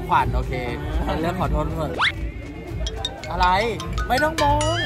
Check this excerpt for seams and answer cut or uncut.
cut